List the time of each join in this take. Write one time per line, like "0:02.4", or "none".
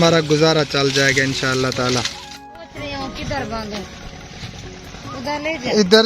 0:02.7